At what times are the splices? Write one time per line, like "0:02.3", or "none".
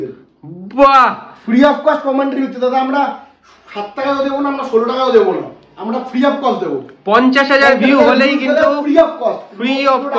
none